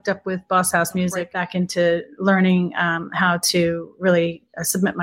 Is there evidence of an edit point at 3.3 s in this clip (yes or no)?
no